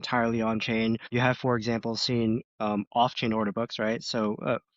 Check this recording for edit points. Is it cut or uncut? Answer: cut